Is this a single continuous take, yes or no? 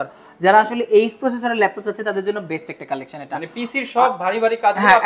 yes